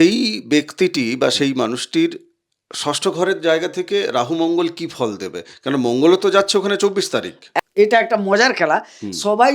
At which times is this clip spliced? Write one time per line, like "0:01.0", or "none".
0:07.7